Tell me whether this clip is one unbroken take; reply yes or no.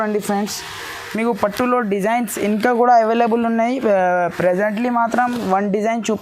yes